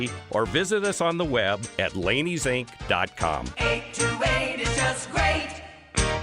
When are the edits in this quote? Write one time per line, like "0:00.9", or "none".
0:03.5